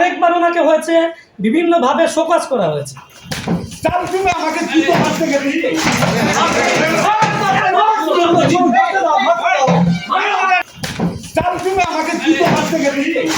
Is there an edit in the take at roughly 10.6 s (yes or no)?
yes